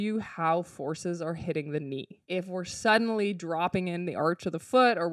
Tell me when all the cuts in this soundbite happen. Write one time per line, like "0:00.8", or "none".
0:02.1